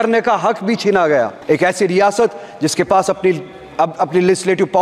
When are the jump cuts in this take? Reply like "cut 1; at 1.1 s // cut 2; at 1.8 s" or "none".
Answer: cut 1; at 1.4 s